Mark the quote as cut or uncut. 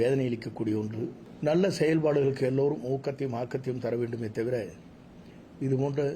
cut